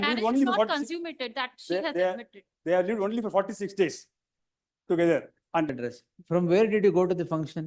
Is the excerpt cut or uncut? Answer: cut